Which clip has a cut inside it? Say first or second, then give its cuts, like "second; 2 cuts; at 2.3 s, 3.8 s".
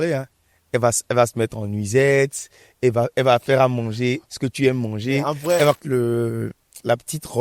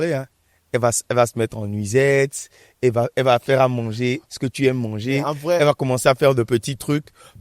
first; 1 cut; at 5.8 s